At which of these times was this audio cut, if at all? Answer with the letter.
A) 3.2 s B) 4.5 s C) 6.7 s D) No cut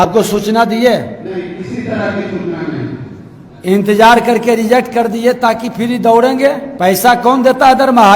C